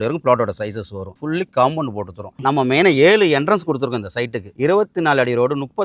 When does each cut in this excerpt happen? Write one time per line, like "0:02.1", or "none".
0:04.4